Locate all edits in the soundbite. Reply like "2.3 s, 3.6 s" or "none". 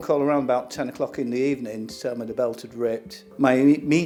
none